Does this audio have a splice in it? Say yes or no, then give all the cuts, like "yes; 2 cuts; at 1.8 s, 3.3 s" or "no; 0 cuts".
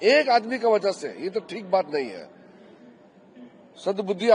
no; 0 cuts